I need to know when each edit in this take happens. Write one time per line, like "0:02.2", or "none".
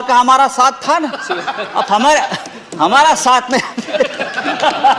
none